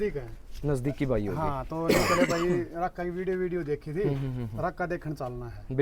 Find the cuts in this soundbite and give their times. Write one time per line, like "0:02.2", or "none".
none